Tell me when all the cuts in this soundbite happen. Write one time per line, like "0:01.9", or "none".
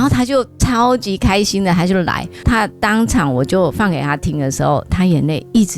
0:02.3